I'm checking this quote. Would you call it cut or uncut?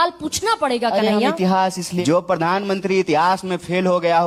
cut